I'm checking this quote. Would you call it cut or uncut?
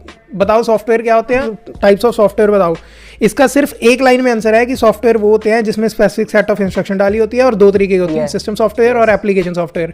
cut